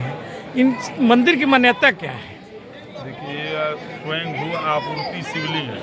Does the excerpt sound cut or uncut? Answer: uncut